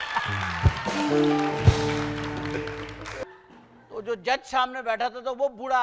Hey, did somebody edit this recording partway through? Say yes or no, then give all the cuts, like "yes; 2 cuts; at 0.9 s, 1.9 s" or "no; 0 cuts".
yes; 1 cut; at 3.2 s